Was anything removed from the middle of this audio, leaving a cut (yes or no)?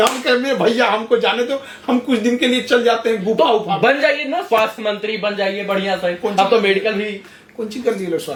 no